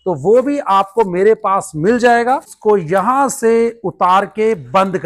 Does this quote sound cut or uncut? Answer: cut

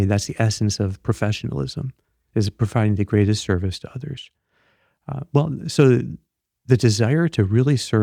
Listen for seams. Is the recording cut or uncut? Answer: uncut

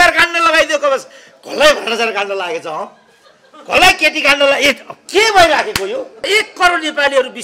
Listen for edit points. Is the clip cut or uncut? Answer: cut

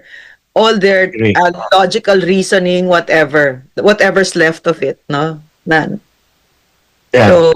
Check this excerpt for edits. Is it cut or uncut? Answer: uncut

